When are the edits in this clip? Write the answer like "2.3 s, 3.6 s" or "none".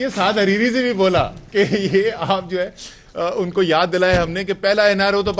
none